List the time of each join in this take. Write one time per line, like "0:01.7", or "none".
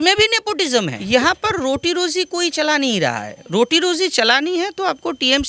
0:01.0